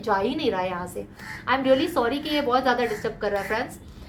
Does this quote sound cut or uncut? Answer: uncut